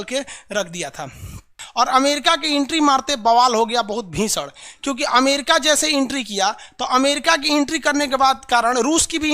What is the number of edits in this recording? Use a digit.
0